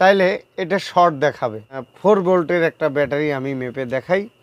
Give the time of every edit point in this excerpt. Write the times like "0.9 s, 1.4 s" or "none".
1.9 s